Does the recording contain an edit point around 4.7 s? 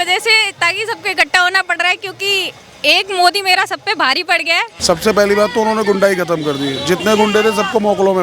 yes; 1 cut; at 4.7 s

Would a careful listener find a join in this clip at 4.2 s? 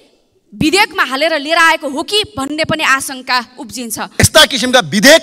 yes; 1 cut; at 4.2 s

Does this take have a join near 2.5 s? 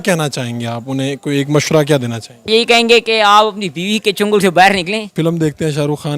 yes; 2 cuts; at 2.5 s, 5.1 s

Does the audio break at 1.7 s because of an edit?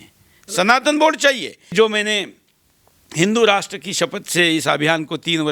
yes; 1 cut; at 1.7 s

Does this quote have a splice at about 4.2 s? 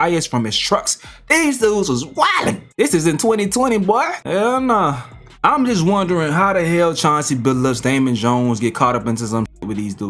yes; 1 cut; at 4.2 s

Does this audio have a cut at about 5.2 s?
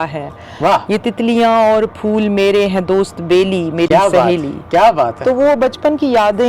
no; 0 cuts

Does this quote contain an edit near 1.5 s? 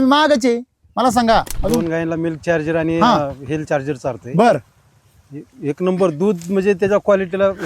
yes; 1 cut; at 1.5 s

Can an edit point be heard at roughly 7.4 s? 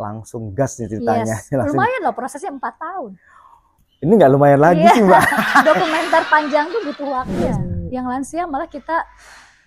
yes; 1 cut; at 7.4 s

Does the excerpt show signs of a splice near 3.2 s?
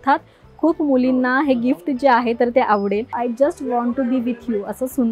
yes; 1 cut; at 3.2 s

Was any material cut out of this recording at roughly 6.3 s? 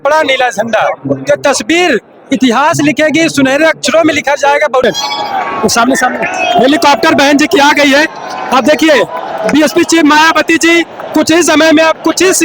no; 1 cut; at 4.8 s

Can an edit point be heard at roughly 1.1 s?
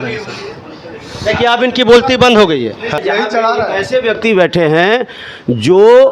no; 1 cut; at 3.0 s

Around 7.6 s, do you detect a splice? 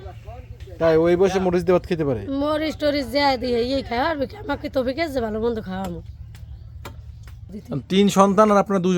yes; 1 cut; at 7.6 s

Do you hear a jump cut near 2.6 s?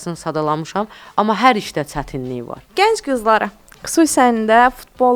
yes; 1 cut; at 2.6 s

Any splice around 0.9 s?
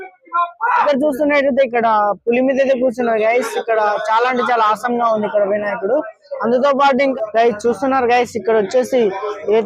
yes; 2 cuts; at 0.9 s, 7.1 s

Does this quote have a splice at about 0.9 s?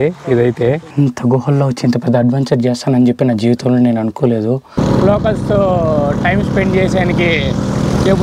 yes; 2 cuts; at 0.9 s, 4.8 s

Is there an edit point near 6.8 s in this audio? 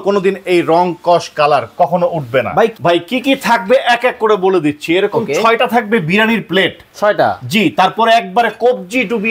no; 1 cut; at 2.8 s

